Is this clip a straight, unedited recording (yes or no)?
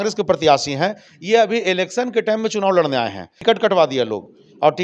no